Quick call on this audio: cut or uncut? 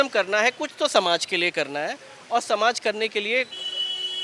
uncut